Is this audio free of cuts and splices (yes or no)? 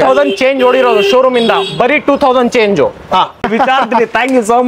no